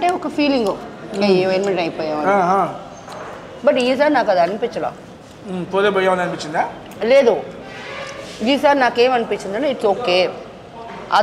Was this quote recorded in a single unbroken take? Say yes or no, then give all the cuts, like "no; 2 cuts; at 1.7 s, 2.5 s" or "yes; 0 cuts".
yes; 0 cuts